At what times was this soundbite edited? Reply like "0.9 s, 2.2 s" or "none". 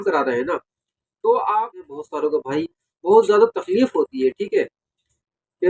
1.9 s